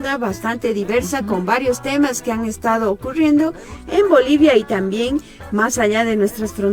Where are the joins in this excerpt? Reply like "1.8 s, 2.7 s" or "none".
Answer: none